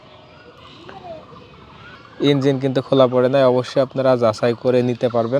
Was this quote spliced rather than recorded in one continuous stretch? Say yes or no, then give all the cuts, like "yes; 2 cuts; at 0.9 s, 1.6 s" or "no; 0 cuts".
yes; 1 cut; at 2.0 s